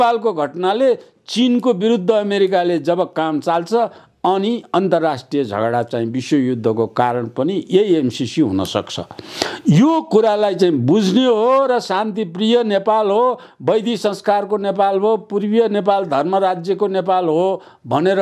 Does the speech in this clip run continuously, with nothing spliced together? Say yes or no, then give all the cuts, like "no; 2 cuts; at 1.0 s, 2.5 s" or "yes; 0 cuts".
yes; 0 cuts